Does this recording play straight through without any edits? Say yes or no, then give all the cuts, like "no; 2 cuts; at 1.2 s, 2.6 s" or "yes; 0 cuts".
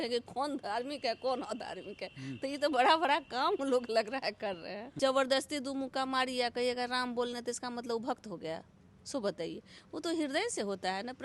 no; 1 cut; at 5.0 s